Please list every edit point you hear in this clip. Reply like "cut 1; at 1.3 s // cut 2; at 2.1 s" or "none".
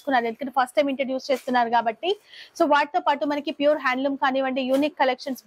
none

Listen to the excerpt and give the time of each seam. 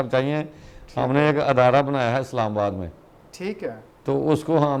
none

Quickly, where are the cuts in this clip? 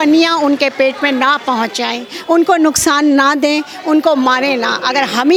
none

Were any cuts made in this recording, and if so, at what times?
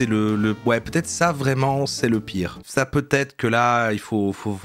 none

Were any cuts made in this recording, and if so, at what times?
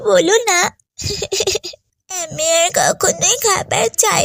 none

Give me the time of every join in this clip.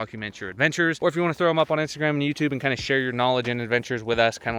none

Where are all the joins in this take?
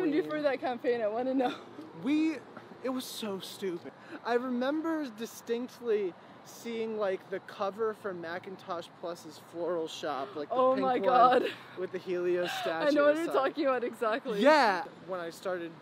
cut 1; at 3.9 s // cut 2; at 14.8 s

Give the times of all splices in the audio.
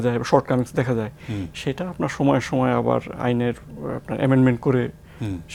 none

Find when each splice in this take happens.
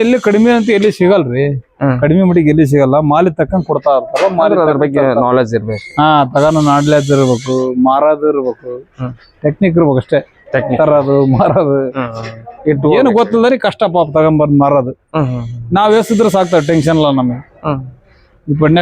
none

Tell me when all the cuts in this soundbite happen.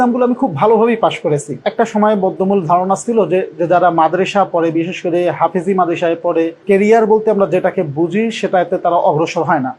cut 1; at 1.5 s // cut 2; at 6.6 s

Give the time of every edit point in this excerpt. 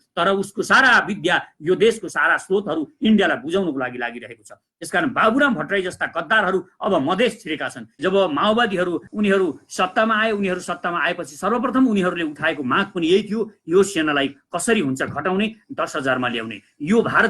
cut 1; at 8.0 s // cut 2; at 9.1 s

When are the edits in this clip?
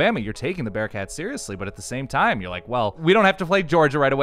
cut 1; at 3.0 s

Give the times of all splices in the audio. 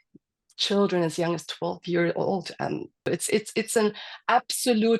cut 1; at 3.0 s

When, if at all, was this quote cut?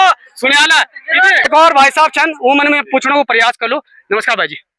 cut 1; at 1.5 s

